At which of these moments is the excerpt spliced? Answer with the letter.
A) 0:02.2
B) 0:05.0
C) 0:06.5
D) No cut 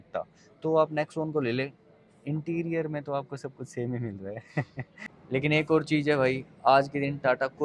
B